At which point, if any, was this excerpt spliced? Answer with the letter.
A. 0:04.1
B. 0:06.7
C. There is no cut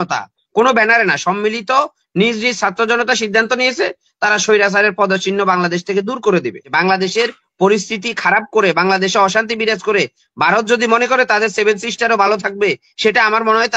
B